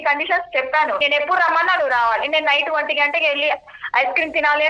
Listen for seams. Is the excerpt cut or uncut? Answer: cut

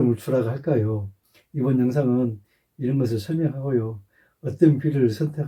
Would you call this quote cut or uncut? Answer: uncut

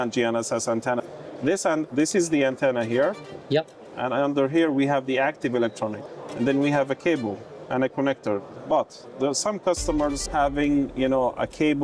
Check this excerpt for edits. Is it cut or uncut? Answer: cut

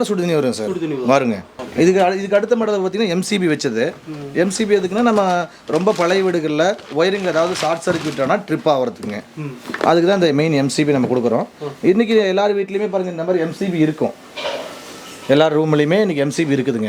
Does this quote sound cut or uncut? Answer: uncut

